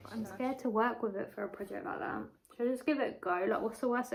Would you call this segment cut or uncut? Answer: uncut